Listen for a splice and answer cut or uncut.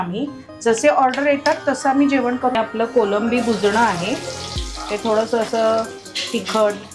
cut